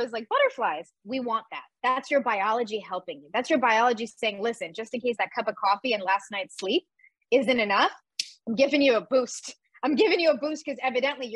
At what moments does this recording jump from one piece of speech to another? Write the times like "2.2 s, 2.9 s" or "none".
1.1 s